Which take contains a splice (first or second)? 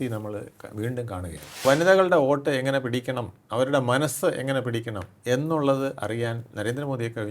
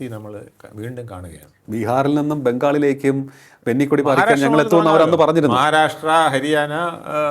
first